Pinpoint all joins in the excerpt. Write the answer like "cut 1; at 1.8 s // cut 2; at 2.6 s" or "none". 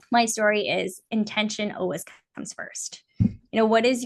none